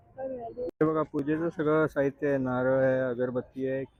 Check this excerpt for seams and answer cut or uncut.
uncut